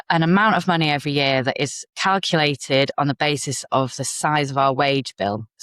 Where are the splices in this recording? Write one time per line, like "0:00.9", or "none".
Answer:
0:01.8